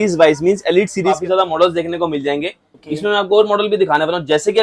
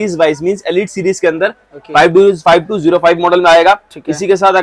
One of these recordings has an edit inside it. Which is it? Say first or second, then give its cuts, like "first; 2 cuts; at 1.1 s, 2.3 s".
first; 1 cut; at 1.2 s